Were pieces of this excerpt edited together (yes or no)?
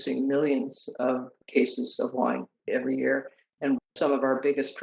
no